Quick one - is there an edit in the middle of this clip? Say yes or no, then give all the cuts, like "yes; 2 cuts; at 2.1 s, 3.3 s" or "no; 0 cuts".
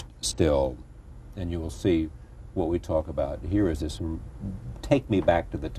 no; 0 cuts